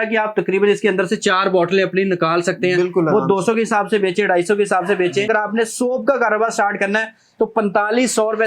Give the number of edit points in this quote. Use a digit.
1